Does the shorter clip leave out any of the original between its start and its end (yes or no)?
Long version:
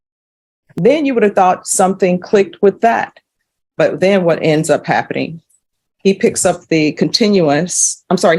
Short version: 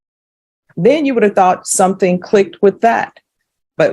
no